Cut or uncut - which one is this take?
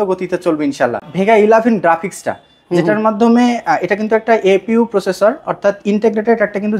cut